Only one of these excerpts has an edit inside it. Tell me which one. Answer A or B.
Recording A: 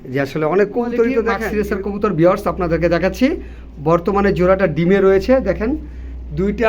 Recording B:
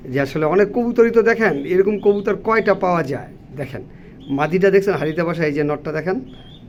A